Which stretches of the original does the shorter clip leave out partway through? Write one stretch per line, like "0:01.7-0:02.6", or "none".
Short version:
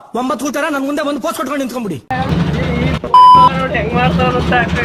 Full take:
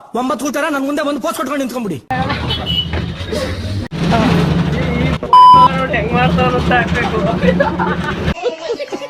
0:02.3-0:04.5